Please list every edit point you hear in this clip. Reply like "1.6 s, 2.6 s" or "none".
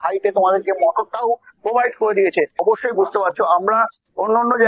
2.6 s